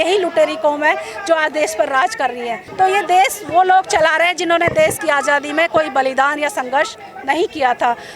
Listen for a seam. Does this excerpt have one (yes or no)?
yes